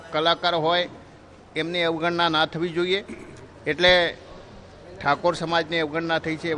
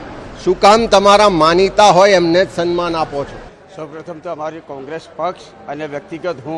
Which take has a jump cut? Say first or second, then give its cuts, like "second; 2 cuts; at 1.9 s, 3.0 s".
second; 1 cut; at 4.9 s